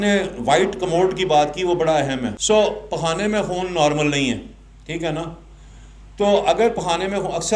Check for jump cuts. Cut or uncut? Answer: cut